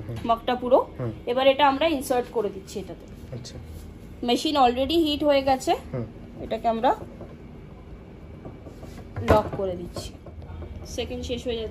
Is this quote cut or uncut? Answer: cut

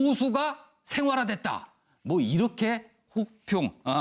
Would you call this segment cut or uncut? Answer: cut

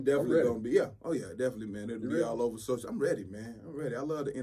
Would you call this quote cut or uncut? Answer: uncut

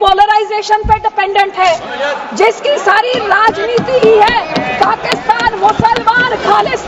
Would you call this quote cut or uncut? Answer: uncut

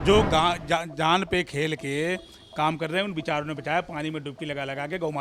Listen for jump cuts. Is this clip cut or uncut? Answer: uncut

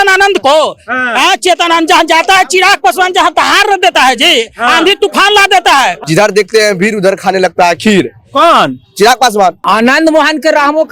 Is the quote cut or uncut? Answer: cut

